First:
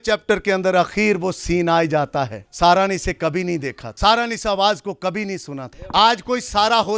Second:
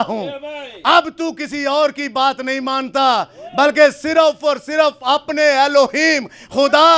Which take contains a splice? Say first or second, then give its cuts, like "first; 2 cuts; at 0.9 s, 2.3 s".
first; 3 cuts; at 2.4 s, 3.8 s, 5.7 s